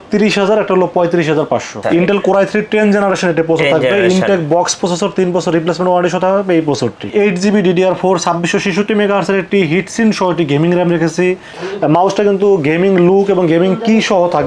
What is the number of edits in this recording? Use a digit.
3